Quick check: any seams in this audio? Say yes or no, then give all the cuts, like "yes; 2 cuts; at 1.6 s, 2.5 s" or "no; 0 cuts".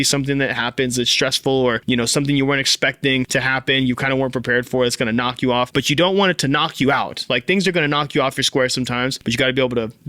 yes; 4 cuts; at 1.8 s, 3.3 s, 5.7 s, 9.2 s